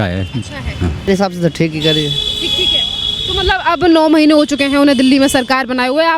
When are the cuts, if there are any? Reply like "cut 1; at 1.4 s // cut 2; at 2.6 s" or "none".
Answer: cut 1; at 1.1 s